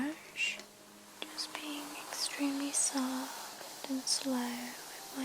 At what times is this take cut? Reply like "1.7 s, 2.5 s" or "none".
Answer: 1.0 s